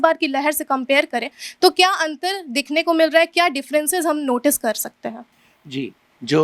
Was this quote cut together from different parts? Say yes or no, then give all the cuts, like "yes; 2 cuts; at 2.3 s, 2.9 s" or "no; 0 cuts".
no; 0 cuts